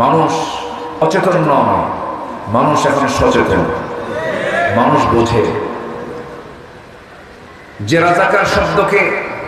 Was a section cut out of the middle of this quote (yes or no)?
yes